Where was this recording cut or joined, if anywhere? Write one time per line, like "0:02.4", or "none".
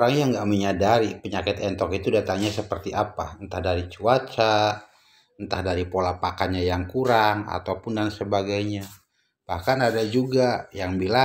none